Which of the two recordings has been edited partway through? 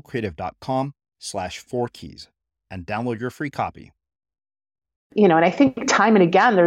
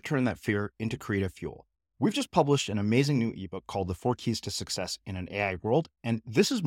first; 1 cut; at 5.1 s

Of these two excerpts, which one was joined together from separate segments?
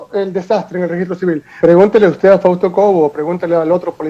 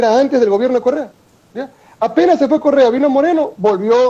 first; 1 cut; at 1.6 s

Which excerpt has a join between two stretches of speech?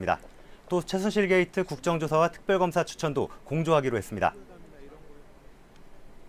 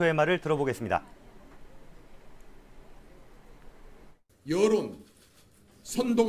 second; 1 cut; at 4.4 s

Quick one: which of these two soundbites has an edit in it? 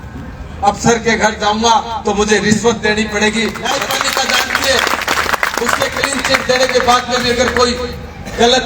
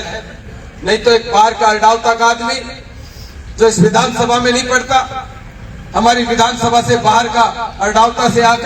first; 1 cut; at 3.7 s

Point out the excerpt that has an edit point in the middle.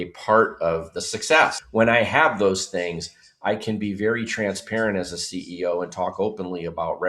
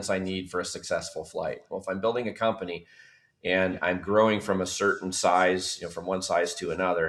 first; 1 cut; at 1.6 s

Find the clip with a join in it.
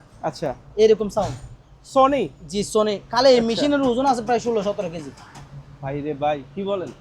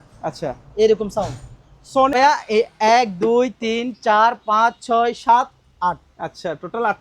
second; 1 cut; at 2.1 s

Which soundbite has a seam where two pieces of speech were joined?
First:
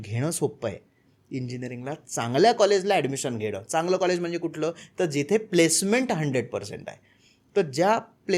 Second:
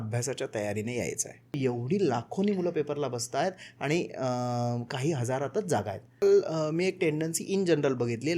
second; 2 cuts; at 1.6 s, 6.2 s

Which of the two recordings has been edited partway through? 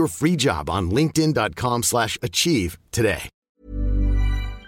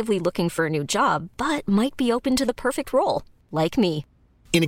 first; 1 cut; at 3.3 s

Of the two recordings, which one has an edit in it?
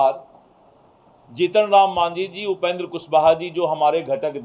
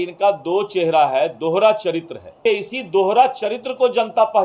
second; 1 cut; at 2.4 s

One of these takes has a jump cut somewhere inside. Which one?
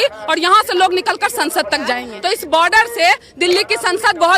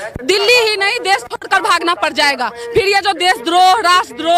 first; 1 cut; at 2.1 s

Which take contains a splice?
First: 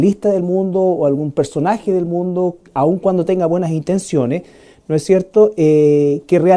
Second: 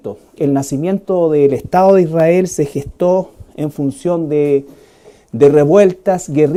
first; 1 cut; at 2.5 s

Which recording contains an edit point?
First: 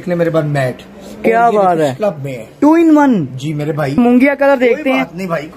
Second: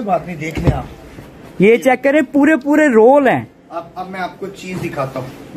first; 1 cut; at 4.0 s

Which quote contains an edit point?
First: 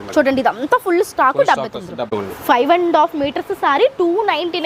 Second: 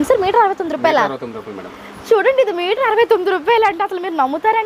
first; 1 cut; at 2.0 s

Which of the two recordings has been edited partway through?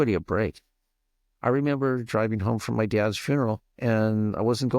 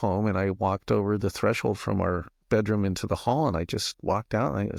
first; 1 cut; at 3.7 s

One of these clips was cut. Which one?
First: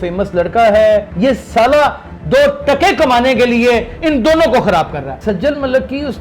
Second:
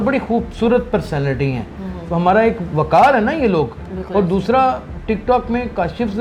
first; 2 cuts; at 1.1 s, 5.2 s

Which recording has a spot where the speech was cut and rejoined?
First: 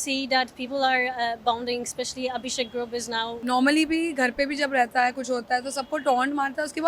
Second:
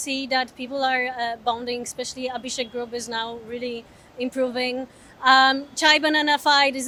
first; 1 cut; at 3.3 s

